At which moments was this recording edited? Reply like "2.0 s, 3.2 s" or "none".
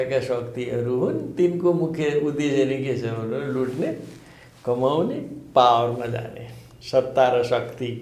none